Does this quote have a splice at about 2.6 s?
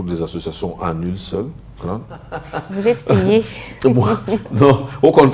yes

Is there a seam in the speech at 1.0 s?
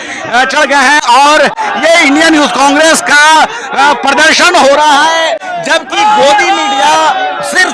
no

